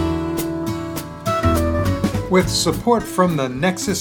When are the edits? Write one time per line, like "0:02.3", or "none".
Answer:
0:02.2